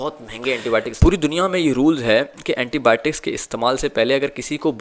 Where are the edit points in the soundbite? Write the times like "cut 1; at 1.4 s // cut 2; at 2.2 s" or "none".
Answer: cut 1; at 0.9 s